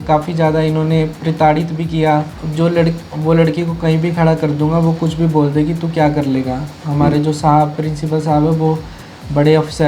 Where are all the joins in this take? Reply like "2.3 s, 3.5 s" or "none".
2.4 s